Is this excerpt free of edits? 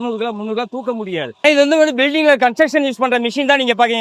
no; 1 cut; at 1.3 s

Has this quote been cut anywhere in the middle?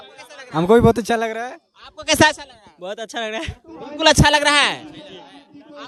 no; 0 cuts

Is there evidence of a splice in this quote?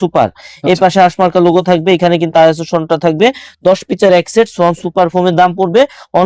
no; 0 cuts

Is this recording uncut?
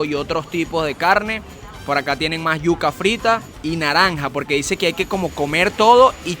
no; 1 cut; at 3.5 s

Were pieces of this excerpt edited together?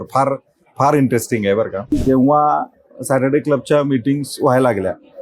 yes; 1 cut; at 1.9 s

